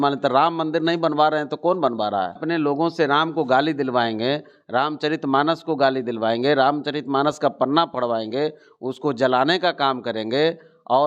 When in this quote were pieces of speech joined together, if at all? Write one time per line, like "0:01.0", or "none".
0:02.4